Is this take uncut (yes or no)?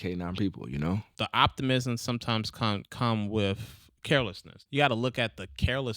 no